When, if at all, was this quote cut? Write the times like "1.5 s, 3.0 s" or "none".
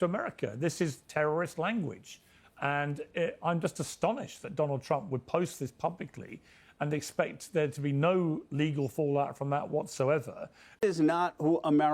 10.8 s